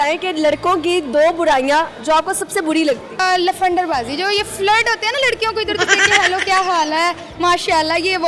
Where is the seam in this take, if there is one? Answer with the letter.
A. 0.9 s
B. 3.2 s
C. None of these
B